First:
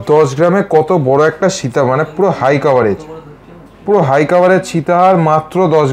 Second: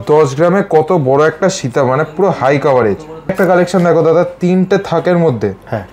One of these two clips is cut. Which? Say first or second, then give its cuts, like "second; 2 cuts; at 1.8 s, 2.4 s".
second; 1 cut; at 3.3 s